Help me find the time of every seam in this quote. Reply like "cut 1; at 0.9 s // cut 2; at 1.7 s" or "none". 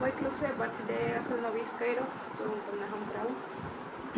none